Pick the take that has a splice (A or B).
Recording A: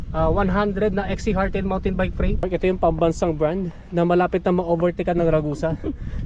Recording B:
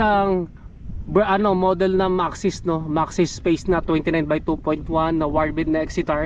A